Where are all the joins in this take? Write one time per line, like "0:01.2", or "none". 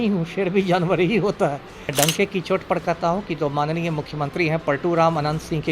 0:01.9

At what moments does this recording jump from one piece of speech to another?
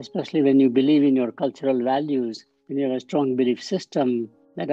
none

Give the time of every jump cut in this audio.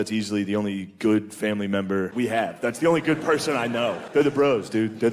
0:02.1
0:04.0

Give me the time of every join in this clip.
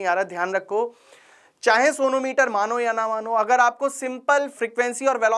none

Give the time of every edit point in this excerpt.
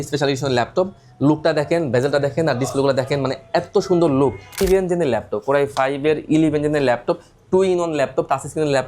0:04.6

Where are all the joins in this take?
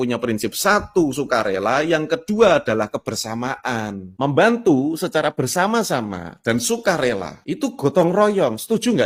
none

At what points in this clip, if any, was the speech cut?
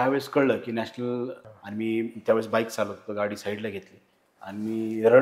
0:01.4

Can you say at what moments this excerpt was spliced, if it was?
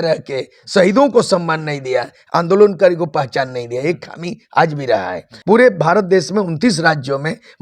0:05.3

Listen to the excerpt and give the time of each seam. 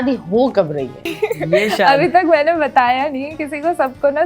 0:01.1

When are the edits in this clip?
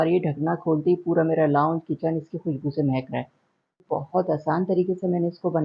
0:03.8

